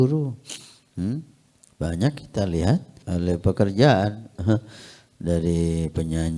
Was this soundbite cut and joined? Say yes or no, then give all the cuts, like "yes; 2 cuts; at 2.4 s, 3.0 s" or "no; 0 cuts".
yes; 1 cut; at 3.0 s